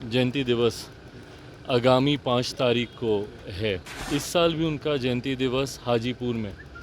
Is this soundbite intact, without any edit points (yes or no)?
no